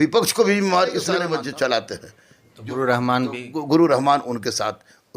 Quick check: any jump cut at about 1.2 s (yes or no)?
yes